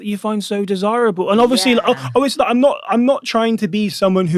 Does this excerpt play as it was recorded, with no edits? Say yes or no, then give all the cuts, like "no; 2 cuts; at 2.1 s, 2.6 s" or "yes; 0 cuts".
yes; 0 cuts